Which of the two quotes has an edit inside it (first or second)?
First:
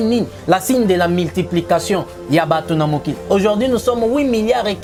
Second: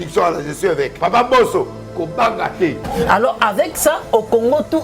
second